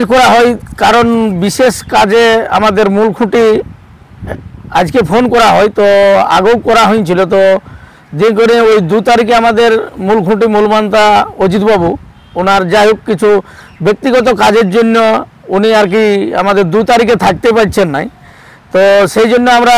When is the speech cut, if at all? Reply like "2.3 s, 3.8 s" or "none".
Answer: none